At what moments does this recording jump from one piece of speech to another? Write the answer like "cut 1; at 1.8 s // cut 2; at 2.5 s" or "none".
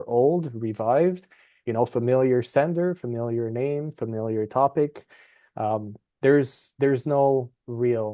none